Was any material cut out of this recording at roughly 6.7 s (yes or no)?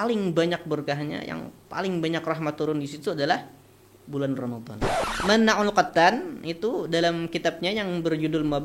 no